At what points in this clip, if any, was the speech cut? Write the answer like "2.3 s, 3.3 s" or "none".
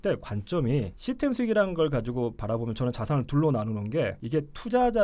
0.9 s, 4.2 s